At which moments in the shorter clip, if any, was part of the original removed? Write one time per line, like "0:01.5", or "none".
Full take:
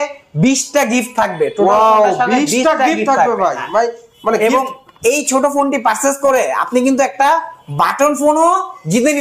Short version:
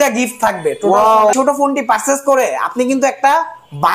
0:01.3